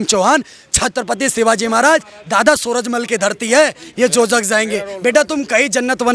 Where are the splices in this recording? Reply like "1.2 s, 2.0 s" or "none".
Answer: 3.9 s